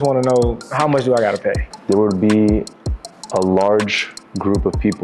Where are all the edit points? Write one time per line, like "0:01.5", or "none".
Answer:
0:01.7